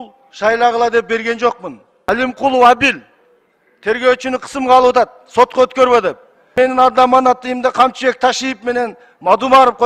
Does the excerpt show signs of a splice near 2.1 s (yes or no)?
yes